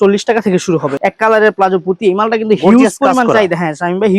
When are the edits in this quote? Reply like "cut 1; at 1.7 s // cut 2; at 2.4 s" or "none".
cut 1; at 0.9 s